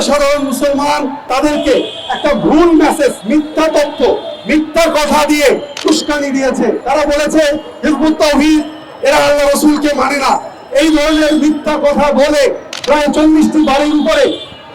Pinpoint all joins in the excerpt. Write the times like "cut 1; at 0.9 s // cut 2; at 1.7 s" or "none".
cut 1; at 1.3 s // cut 2; at 3.2 s // cut 3; at 5.7 s // cut 4; at 6.8 s // cut 5; at 12.7 s